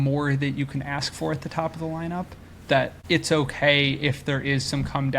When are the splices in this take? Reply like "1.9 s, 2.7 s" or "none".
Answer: 3.0 s